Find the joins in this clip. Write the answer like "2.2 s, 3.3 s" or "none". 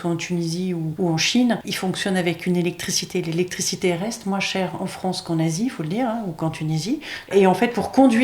0.9 s, 1.7 s, 7.3 s